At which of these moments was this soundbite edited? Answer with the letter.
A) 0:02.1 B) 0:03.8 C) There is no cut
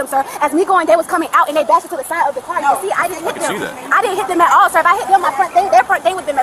C